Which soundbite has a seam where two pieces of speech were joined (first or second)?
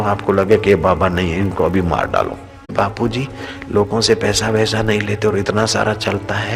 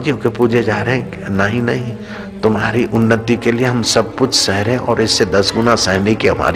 first